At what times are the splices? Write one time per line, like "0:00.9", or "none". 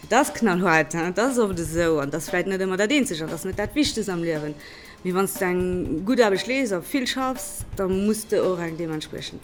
none